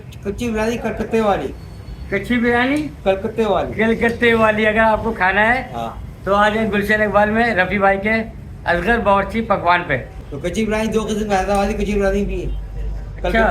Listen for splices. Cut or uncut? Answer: cut